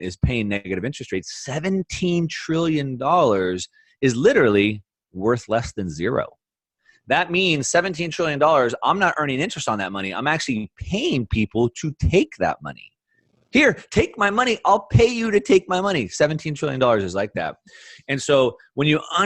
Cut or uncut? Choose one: uncut